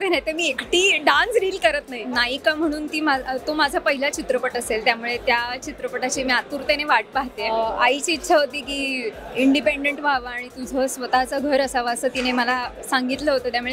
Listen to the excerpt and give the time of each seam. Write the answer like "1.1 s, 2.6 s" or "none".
2.0 s, 7.5 s